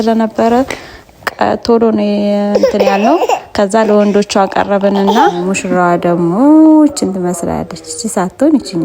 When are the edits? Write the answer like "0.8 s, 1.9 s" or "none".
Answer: 5.6 s